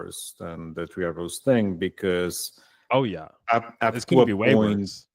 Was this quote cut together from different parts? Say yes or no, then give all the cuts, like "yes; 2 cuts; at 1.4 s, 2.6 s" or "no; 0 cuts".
no; 0 cuts